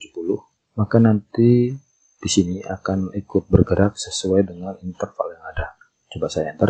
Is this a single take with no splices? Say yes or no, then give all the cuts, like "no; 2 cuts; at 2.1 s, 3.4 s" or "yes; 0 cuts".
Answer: yes; 0 cuts